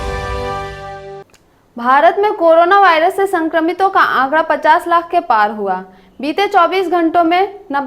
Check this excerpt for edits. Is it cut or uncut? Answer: cut